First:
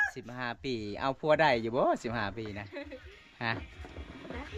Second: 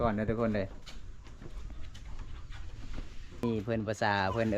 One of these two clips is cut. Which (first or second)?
second